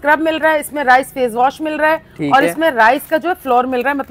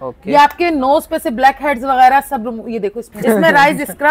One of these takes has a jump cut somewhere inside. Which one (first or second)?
second